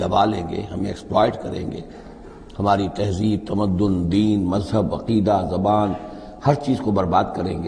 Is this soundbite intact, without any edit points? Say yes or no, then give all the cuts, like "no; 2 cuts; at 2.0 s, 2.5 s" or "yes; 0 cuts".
yes; 0 cuts